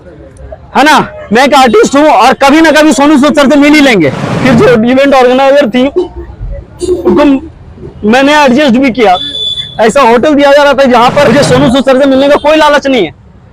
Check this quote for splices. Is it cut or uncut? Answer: cut